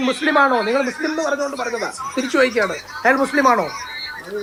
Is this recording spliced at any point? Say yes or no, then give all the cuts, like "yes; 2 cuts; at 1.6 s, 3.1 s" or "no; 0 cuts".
no; 0 cuts